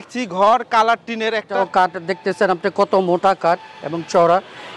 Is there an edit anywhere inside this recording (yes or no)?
yes